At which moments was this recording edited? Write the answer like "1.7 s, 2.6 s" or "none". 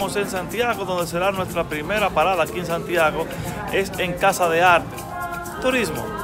4.9 s

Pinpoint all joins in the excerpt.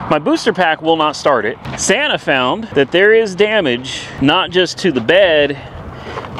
1.7 s, 2.7 s, 4.0 s

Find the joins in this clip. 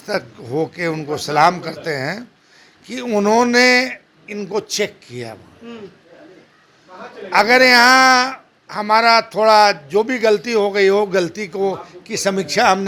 none

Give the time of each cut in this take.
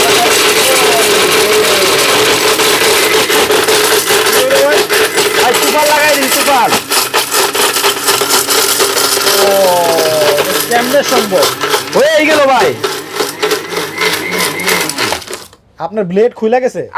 none

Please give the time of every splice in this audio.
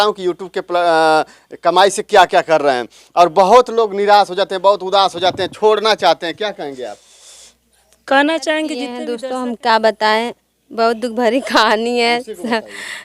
9.0 s

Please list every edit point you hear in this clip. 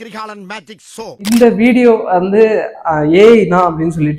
none

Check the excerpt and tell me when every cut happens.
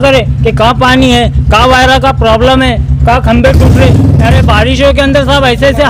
none

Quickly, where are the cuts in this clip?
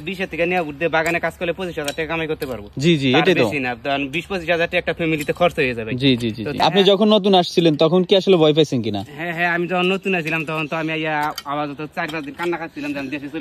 6.5 s

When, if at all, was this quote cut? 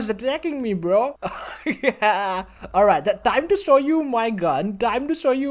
none

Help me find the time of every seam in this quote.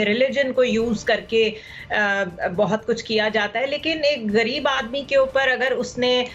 none

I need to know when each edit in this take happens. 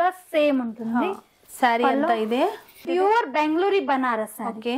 2.7 s

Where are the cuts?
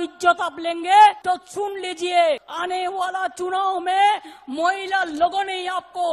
1.2 s, 2.5 s

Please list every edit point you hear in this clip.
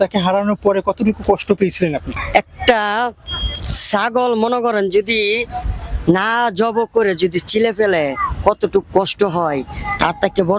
2.1 s

